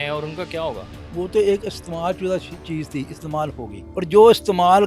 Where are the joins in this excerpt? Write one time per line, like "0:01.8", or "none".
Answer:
0:00.9
0:03.8